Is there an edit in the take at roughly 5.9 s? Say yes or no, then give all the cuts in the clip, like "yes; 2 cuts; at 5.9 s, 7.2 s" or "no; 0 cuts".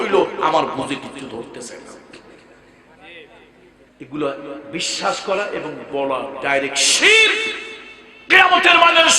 no; 1 cut; at 3.9 s